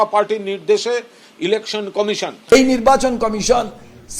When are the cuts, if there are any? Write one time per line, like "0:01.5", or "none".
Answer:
0:02.5